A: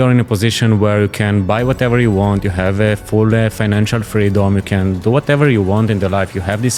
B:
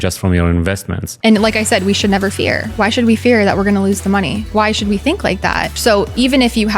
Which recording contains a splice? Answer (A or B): B